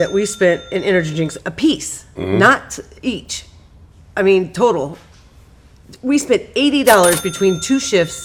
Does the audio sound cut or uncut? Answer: uncut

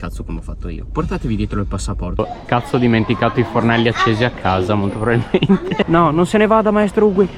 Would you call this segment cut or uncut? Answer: cut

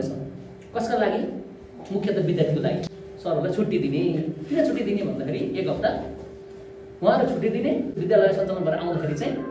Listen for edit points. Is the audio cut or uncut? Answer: cut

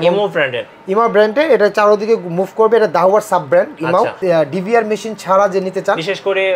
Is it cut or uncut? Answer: cut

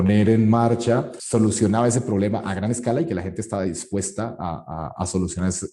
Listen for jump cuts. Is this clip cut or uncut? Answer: cut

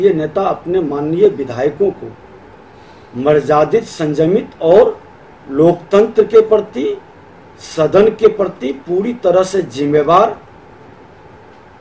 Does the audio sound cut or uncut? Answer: uncut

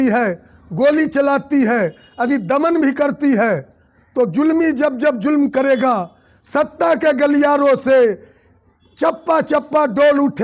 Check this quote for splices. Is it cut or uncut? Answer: uncut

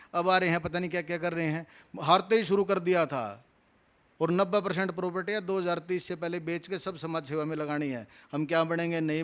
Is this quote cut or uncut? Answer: uncut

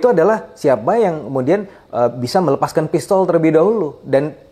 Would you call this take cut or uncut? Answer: uncut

